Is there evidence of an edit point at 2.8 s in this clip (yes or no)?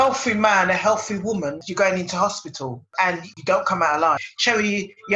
no